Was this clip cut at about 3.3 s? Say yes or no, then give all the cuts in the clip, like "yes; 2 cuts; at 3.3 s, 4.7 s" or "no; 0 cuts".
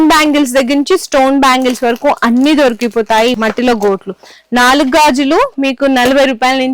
yes; 1 cut; at 3.3 s